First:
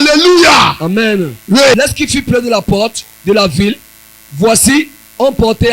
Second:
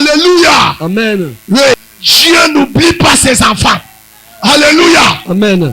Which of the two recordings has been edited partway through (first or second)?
second